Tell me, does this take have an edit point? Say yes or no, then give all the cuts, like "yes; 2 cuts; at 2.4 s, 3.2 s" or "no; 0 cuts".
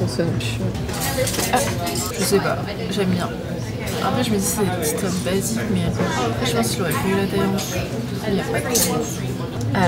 no; 0 cuts